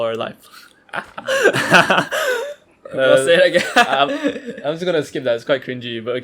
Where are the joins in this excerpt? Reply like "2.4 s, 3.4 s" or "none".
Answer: none

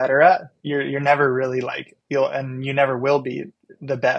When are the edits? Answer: none

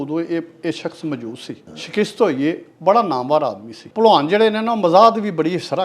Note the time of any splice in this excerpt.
1.7 s, 3.8 s

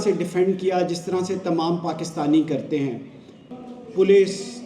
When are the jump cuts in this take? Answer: 3.4 s

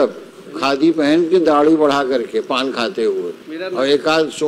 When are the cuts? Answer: 3.4 s

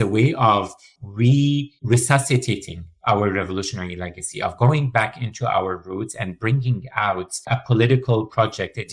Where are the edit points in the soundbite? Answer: 1.7 s, 7.5 s

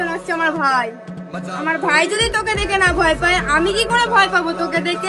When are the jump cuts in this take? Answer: none

